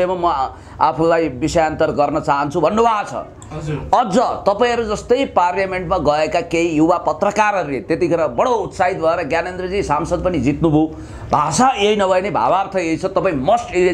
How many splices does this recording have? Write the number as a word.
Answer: zero